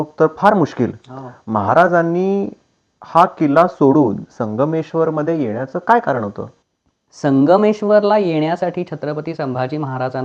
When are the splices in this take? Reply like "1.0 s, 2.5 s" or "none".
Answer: none